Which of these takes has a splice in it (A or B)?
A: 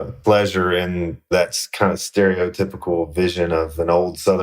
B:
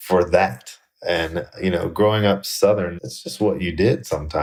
A